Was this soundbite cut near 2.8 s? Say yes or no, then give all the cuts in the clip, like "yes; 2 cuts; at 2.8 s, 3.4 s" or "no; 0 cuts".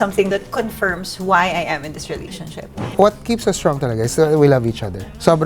yes; 1 cut; at 2.8 s